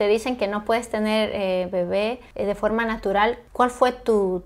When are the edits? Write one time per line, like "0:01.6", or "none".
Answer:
0:02.2
0:03.4